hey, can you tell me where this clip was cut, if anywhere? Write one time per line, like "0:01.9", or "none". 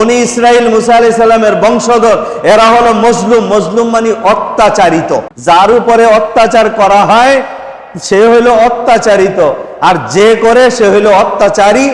0:05.3